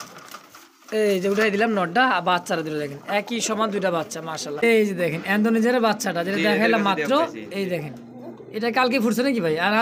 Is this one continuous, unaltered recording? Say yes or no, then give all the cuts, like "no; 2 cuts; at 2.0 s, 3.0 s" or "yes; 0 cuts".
no; 1 cut; at 4.6 s